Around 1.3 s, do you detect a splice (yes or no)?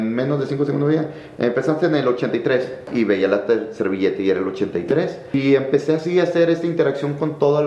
no